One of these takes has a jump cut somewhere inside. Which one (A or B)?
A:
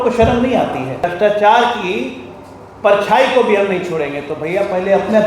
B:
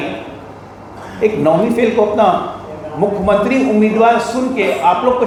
A